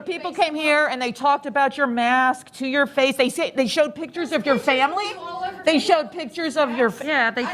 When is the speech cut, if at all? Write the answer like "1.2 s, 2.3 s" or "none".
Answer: none